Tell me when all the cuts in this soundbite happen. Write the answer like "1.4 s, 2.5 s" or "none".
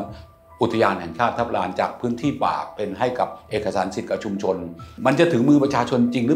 4.9 s